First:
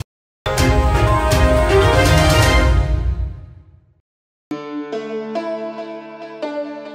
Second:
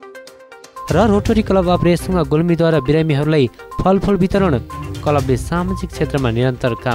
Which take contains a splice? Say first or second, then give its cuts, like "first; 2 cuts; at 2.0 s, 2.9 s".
first; 1 cut; at 4.5 s